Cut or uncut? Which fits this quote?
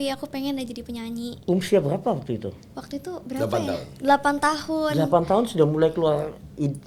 uncut